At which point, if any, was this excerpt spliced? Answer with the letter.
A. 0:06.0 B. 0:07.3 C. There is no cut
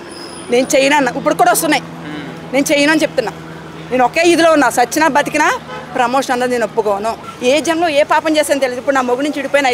B